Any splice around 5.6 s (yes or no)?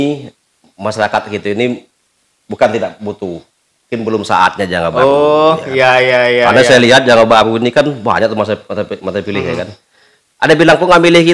no